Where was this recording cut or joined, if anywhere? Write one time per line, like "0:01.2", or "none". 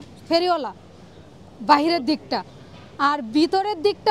none